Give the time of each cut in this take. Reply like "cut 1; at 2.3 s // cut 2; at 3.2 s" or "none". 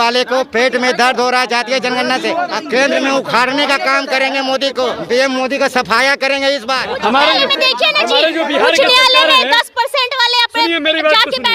cut 1; at 2.6 s // cut 2; at 5.0 s // cut 3; at 6.9 s